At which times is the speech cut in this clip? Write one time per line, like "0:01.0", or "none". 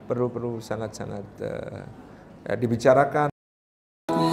0:03.4